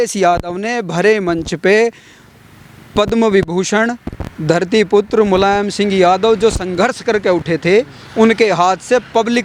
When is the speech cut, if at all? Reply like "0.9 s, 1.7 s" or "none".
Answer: none